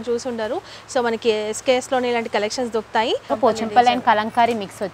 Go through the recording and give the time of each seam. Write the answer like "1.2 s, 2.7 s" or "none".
3.2 s